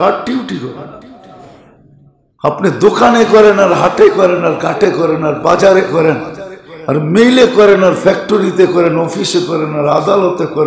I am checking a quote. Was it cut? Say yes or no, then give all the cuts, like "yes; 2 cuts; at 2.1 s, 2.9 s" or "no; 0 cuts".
yes; 1 cut; at 1.7 s